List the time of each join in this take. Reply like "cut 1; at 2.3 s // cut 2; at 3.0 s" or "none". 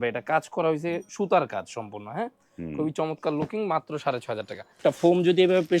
cut 1; at 4.8 s